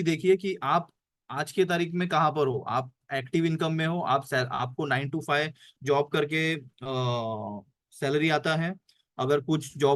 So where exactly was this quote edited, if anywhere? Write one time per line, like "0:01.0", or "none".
none

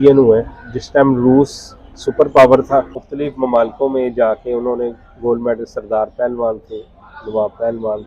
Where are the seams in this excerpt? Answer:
0:03.0

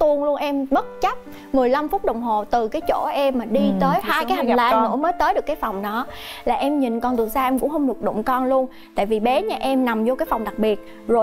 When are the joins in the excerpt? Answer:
none

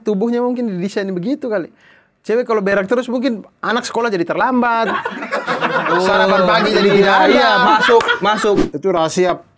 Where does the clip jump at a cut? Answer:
0:08.6

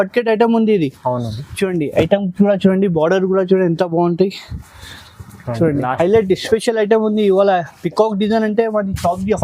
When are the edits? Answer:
0:05.9

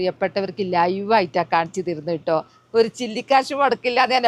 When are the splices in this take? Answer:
none

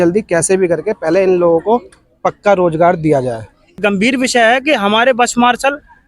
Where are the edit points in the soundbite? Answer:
0:03.8

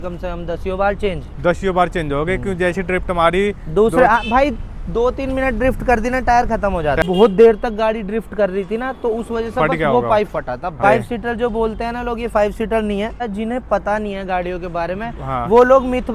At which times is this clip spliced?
0:07.0
0:10.8
0:13.2

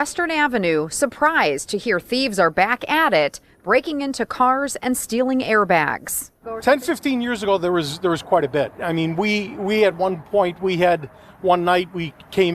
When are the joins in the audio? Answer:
0:06.1

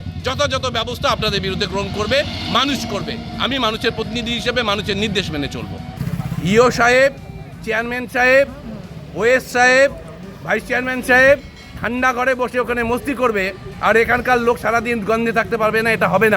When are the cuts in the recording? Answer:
0:05.9

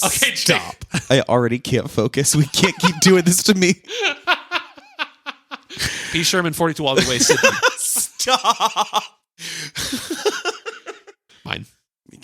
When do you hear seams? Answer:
0:00.9

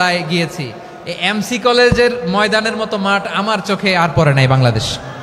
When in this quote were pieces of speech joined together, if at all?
none

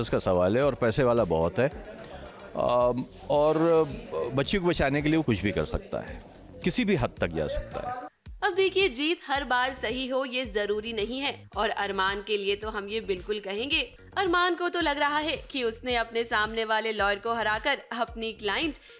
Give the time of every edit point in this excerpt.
none

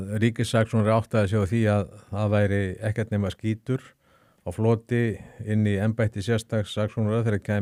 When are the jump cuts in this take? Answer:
none

